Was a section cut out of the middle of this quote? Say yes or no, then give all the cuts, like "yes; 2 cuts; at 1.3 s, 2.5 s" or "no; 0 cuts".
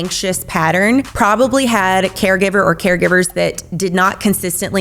yes; 1 cut; at 1.1 s